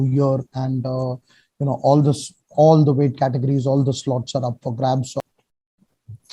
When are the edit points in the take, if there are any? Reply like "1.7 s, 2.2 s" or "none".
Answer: 5.2 s